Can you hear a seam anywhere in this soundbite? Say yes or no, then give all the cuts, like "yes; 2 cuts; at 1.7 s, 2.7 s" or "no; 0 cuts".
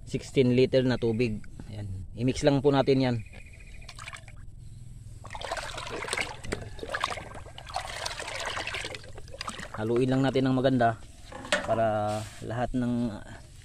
no; 0 cuts